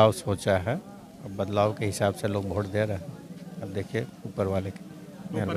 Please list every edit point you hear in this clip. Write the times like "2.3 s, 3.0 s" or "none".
none